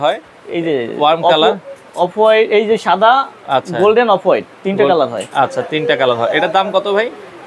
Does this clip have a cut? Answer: no; 0 cuts

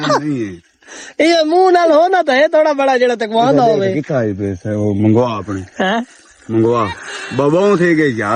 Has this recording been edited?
no; 0 cuts

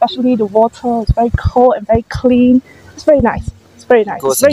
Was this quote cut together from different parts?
no; 0 cuts

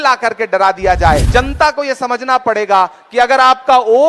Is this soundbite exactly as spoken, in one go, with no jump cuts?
no; 1 cut; at 1.2 s

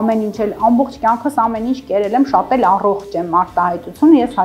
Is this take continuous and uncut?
yes; 0 cuts

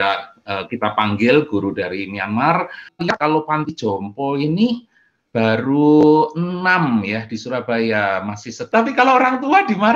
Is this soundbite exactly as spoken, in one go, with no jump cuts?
no; 2 cuts; at 2.8 s, 8.5 s

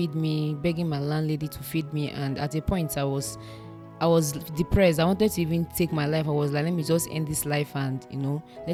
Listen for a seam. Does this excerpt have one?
no; 0 cuts

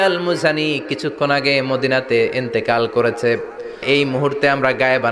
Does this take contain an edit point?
yes; 1 cut; at 3.8 s

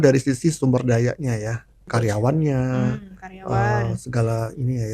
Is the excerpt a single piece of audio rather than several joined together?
yes; 0 cuts

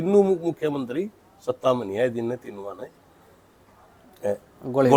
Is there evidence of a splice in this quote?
no; 0 cuts

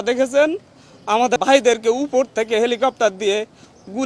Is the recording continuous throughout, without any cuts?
no; 1 cut; at 1.4 s

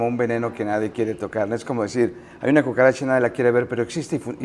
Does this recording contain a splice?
no; 0 cuts

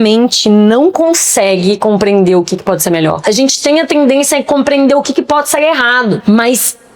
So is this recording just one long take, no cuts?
no; 2 cuts; at 3.2 s, 6.2 s

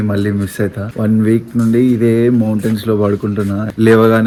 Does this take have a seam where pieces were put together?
no; 0 cuts

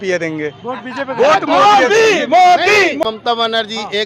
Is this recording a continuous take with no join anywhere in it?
no; 1 cut; at 2.8 s

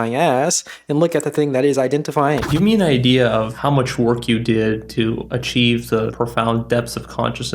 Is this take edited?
yes; 4 cuts; at 2.5 s, 3.5 s, 5.3 s, 6.1 s

